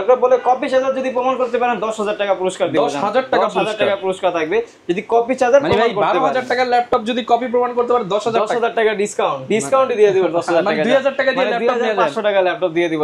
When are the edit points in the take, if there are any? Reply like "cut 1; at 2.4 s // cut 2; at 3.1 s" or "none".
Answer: none